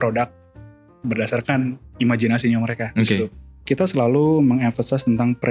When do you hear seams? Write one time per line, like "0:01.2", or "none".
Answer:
0:03.5